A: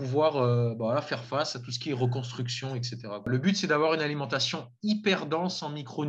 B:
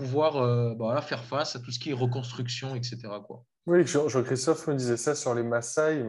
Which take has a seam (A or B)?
A